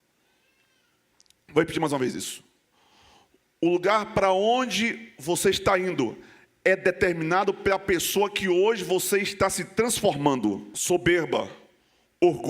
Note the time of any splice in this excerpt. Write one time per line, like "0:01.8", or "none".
0:10.7